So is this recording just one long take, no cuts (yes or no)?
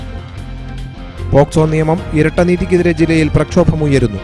no